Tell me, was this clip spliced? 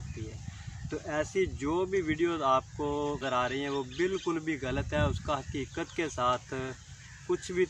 yes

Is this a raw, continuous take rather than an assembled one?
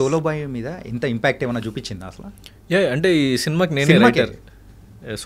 yes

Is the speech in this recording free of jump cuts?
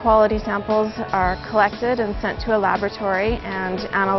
yes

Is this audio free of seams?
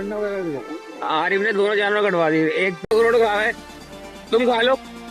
no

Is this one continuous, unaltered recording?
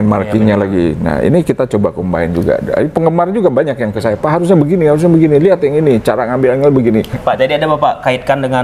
no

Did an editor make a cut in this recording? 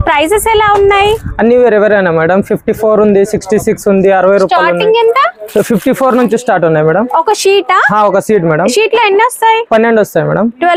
no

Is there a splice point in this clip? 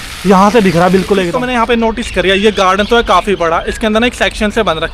yes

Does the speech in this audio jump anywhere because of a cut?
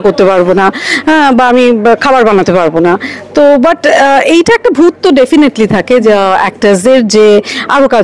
no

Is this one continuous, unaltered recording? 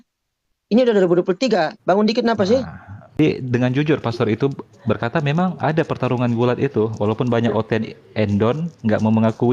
no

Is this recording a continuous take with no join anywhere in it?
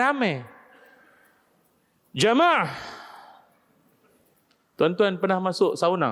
no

